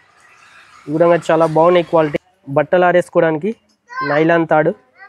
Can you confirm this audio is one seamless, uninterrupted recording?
no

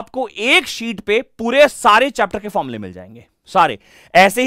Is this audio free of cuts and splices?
yes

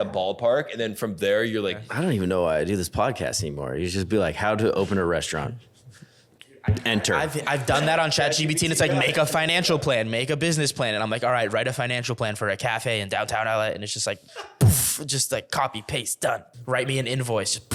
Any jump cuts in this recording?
yes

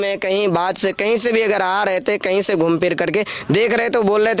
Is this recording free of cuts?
yes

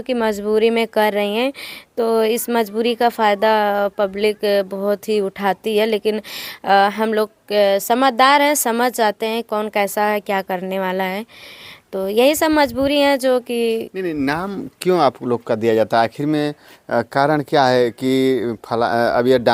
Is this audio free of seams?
yes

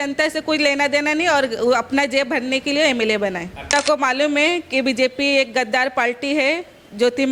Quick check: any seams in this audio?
yes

